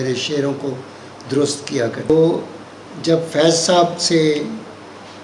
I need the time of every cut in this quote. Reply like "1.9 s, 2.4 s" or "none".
2.1 s